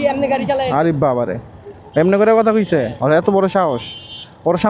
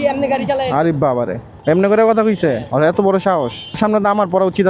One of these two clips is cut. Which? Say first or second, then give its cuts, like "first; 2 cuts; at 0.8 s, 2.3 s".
second; 2 cuts; at 1.5 s, 3.8 s